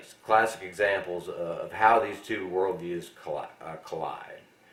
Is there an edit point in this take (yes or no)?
no